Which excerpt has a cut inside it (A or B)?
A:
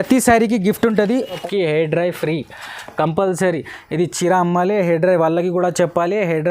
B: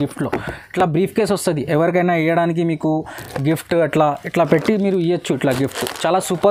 A